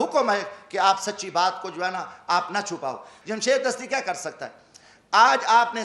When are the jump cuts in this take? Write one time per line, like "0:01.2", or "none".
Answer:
0:03.1